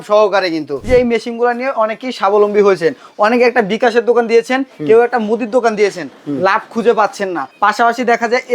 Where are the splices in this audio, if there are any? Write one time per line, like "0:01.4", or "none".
0:00.8
0:07.5